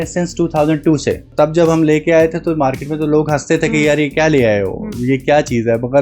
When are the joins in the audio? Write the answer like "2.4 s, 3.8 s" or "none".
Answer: 1.3 s